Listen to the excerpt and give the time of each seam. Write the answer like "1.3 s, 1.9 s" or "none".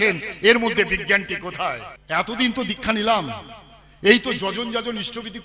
1.9 s